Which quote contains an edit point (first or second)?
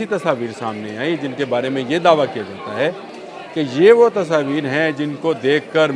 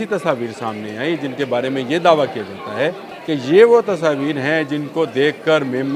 second